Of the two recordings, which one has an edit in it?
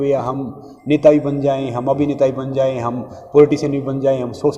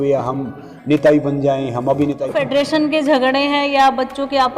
second; 1 cut; at 2.5 s

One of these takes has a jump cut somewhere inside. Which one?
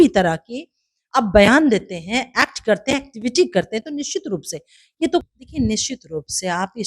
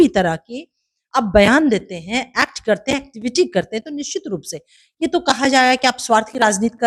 first; 1 cut; at 5.2 s

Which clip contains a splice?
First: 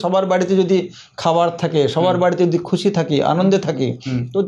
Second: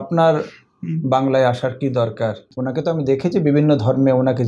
second; 1 cut; at 2.5 s

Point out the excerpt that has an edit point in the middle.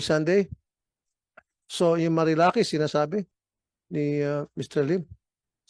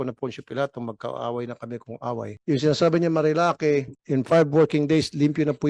second; 2 cuts; at 2.3 s, 4.0 s

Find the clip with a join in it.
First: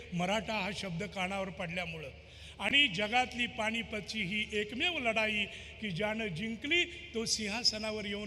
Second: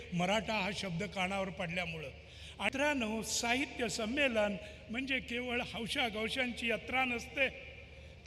second; 1 cut; at 2.7 s

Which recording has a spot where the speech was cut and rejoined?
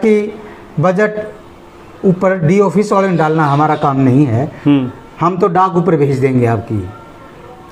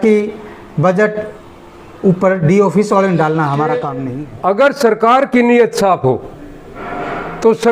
second; 1 cut; at 3.9 s

